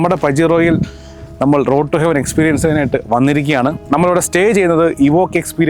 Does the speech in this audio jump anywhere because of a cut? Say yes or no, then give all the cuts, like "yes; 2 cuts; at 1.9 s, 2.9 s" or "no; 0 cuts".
yes; 1 cut; at 3.8 s